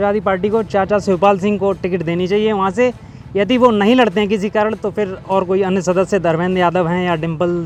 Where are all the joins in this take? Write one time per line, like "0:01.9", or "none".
none